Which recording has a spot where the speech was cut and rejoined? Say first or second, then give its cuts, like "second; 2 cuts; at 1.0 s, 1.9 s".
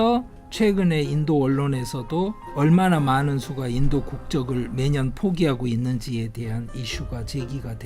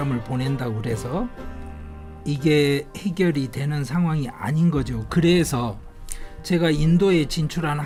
first; 1 cut; at 2.4 s